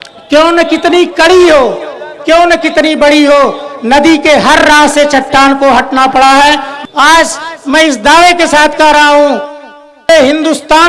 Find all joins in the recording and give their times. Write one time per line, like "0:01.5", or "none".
0:06.8